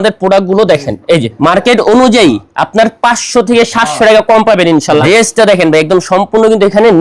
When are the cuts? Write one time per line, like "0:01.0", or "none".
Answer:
0:01.3
0:05.0